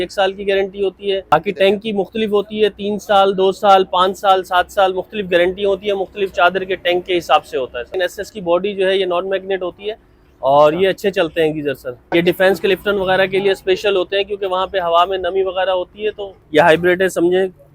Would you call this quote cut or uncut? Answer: cut